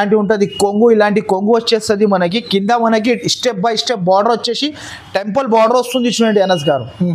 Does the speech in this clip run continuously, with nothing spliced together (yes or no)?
yes